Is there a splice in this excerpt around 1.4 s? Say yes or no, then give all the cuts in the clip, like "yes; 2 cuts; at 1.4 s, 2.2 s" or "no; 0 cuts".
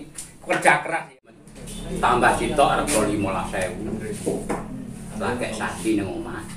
yes; 1 cut; at 1.4 s